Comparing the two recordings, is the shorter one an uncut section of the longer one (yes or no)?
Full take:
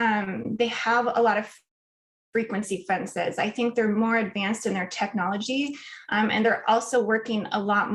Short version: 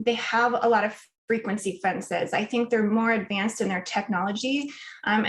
no